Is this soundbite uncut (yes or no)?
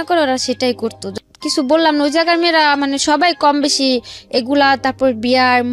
no